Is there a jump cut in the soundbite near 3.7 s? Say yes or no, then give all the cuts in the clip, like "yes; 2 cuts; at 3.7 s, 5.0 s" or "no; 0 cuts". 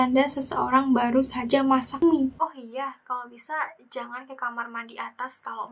no; 1 cut; at 2.3 s